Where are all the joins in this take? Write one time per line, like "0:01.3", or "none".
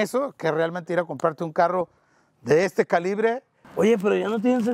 0:03.6